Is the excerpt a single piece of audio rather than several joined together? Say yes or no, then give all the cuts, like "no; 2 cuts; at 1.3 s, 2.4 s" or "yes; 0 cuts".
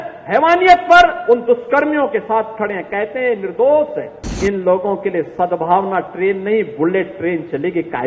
no; 1 cut; at 4.3 s